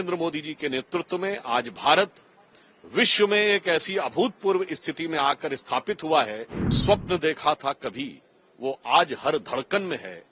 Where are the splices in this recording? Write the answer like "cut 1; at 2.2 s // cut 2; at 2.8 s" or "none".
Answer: cut 1; at 6.7 s